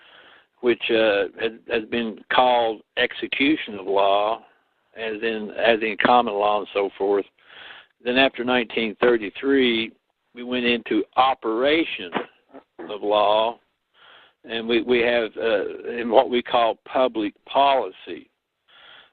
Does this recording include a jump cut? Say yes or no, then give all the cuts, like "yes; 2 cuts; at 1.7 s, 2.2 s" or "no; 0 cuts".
no; 0 cuts